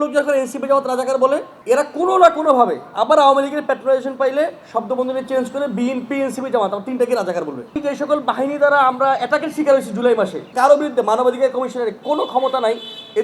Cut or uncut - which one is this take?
cut